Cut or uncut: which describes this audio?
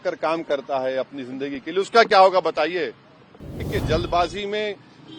cut